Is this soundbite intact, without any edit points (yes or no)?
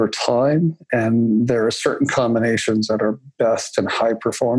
yes